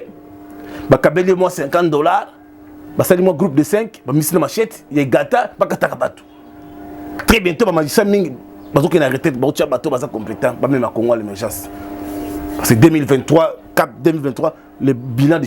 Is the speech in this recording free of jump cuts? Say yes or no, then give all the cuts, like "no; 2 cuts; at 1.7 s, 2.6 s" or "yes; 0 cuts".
no; 1 cut; at 7.2 s